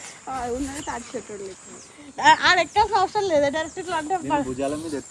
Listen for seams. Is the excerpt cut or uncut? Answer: uncut